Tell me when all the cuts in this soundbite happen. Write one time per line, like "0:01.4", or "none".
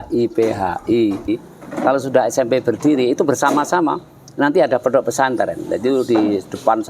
0:01.3